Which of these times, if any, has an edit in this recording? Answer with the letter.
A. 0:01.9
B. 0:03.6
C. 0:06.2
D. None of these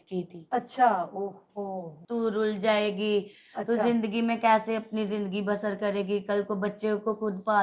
A